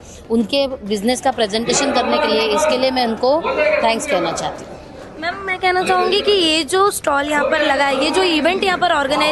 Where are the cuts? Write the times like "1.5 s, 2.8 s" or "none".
none